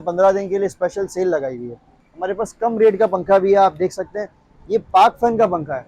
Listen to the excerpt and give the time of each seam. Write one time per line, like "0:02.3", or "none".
none